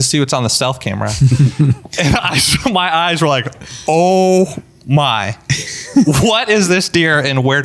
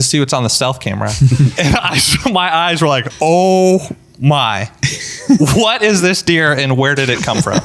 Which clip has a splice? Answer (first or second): second